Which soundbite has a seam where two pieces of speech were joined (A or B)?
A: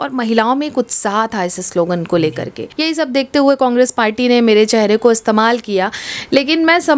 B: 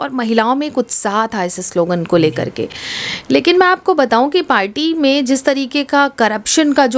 A